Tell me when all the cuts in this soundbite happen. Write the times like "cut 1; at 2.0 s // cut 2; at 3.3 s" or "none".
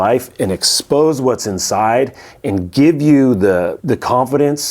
cut 1; at 3.8 s

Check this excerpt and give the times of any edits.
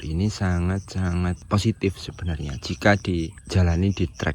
cut 1; at 1.4 s // cut 2; at 3.4 s

